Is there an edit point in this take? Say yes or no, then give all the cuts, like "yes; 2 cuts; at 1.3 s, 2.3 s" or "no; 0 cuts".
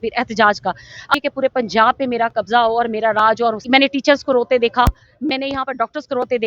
yes; 2 cuts; at 1.1 s, 3.6 s